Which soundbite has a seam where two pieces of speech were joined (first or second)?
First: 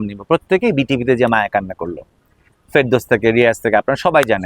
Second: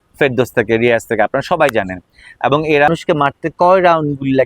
second